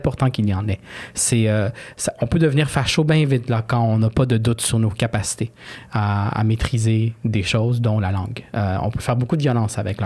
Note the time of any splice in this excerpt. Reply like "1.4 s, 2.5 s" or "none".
none